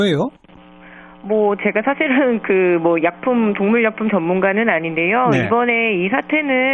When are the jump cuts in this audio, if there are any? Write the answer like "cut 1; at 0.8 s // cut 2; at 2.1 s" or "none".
none